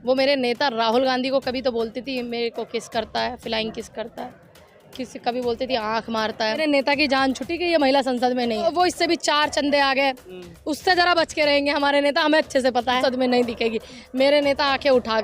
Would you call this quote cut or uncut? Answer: cut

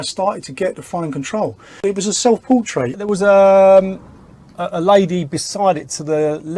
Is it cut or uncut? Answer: uncut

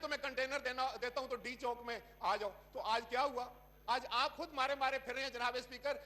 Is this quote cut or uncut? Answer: uncut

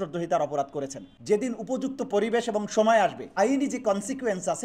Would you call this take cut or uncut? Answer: cut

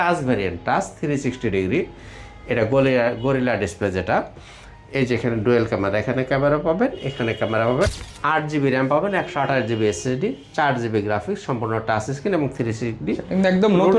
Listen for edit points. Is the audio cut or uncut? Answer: cut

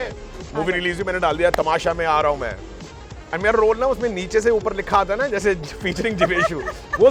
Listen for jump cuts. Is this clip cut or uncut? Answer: uncut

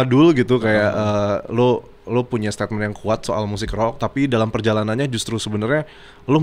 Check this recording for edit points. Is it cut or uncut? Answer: uncut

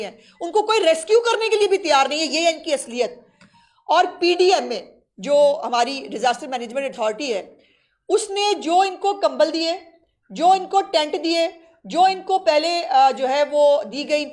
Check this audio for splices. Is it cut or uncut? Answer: uncut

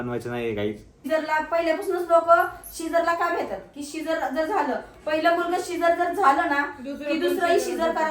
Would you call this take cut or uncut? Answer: cut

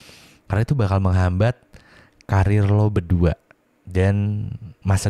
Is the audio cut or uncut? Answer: uncut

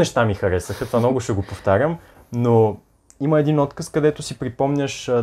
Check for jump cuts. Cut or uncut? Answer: uncut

